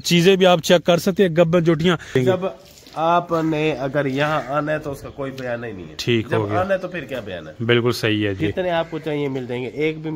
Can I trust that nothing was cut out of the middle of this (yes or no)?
no